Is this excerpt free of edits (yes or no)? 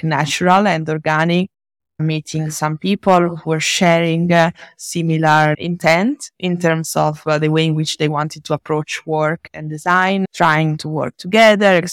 yes